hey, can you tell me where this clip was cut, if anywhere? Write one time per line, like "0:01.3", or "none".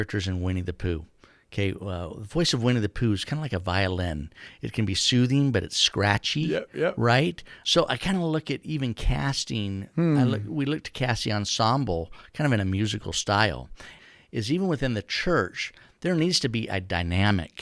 0:07.5
0:14.0